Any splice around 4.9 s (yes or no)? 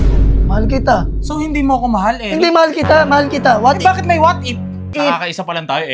yes